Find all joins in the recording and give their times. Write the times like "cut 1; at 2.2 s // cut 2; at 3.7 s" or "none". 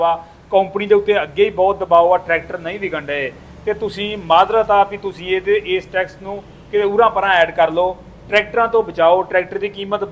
none